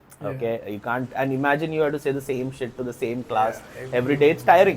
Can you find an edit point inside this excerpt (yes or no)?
no